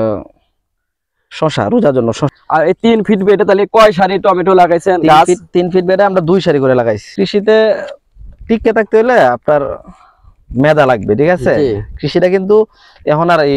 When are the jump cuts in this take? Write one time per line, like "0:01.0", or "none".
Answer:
0:02.3
0:07.1